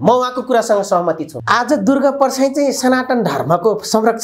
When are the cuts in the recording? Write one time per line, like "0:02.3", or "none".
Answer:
0:01.3